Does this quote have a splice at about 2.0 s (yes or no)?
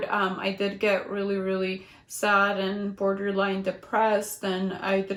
no